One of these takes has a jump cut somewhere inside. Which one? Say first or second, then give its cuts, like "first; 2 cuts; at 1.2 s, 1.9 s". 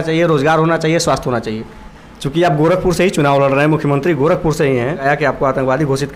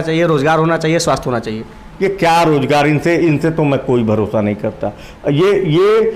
first; 2 cuts; at 1.8 s, 5.0 s